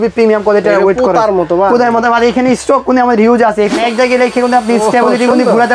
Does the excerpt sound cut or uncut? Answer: cut